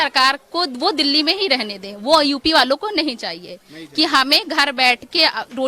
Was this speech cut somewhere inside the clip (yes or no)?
no